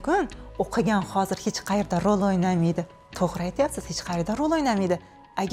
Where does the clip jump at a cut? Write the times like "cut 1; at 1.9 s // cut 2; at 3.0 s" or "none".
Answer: none

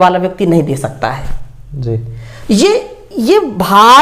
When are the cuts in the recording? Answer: none

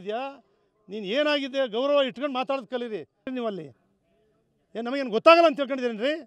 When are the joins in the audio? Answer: cut 1; at 3.3 s

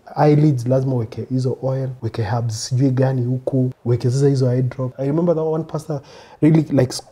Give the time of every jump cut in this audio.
cut 1; at 2.0 s // cut 2; at 3.8 s // cut 3; at 4.9 s

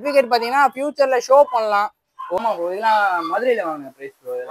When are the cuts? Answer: cut 1; at 2.4 s

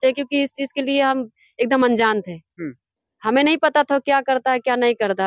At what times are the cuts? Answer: none

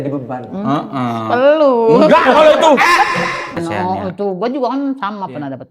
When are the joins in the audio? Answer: cut 1; at 3.6 s

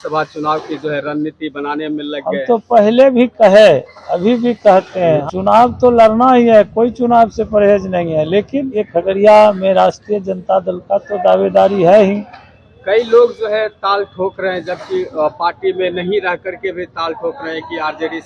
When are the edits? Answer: cut 1; at 5.2 s // cut 2; at 8.8 s

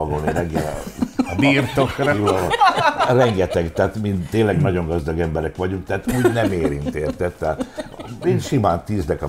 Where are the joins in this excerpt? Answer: none

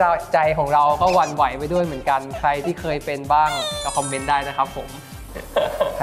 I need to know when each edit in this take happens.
none

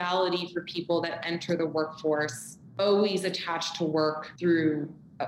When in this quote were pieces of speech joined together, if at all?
none

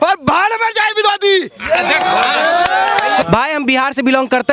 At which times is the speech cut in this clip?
cut 1; at 3.2 s

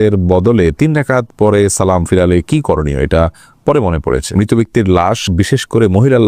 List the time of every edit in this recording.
cut 1; at 4.3 s

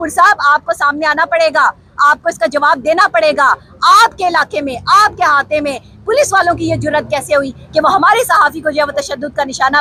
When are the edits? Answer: none

